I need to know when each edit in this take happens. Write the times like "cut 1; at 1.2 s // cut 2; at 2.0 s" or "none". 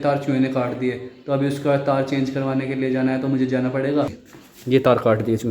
cut 1; at 4.2 s